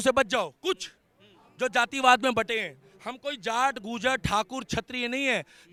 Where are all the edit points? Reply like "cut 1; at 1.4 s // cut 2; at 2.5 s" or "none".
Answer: none

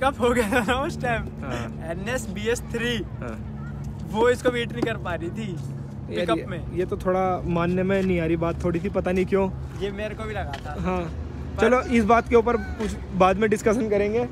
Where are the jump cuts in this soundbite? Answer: none

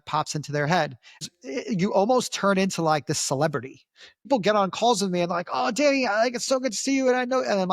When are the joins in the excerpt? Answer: cut 1; at 1.2 s // cut 2; at 4.3 s

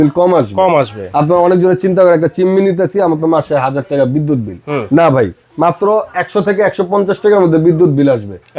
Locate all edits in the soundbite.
none

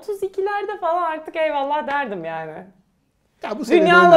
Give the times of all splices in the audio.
none

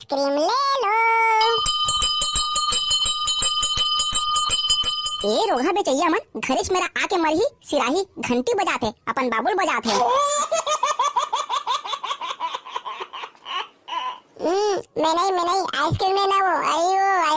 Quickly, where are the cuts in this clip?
none

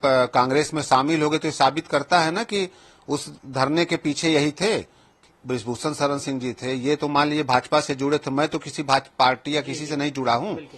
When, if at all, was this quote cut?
cut 1; at 5.2 s

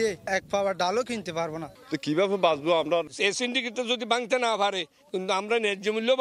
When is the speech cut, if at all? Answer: cut 1; at 1.6 s // cut 2; at 3.0 s

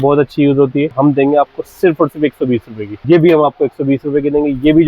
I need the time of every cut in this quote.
cut 1; at 0.9 s // cut 2; at 3.0 s

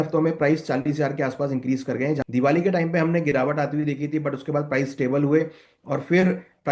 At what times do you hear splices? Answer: cut 1; at 2.2 s

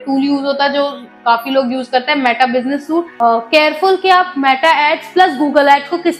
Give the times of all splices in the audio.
cut 1; at 3.1 s

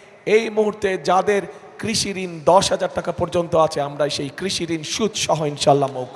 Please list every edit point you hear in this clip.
none

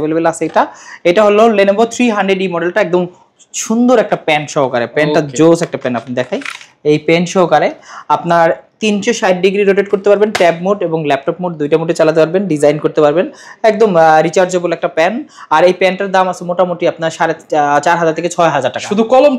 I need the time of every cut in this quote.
none

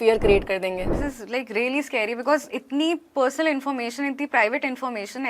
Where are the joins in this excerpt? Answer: cut 1; at 0.9 s

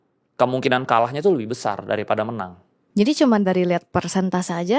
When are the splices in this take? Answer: cut 1; at 2.8 s

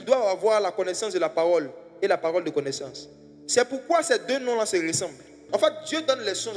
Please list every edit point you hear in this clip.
cut 1; at 5.4 s

